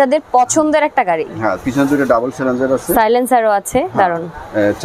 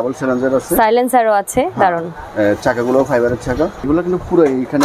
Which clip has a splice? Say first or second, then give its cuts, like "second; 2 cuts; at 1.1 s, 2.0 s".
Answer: second; 1 cut; at 3.8 s